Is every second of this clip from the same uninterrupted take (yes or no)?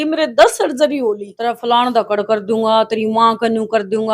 no